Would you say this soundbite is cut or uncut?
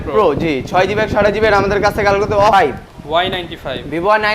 cut